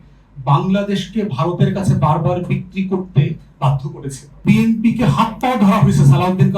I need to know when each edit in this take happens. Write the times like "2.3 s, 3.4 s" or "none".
4.4 s